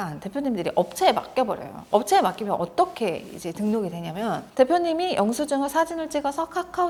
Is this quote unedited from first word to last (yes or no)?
yes